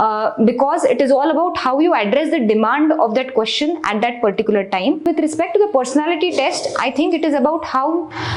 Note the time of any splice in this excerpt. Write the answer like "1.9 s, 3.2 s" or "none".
5.0 s